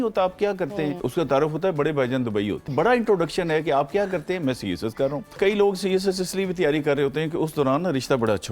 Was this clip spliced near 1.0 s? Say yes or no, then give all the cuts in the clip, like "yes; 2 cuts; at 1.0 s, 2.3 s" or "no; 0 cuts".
yes; 3 cuts; at 1.0 s, 2.7 s, 5.4 s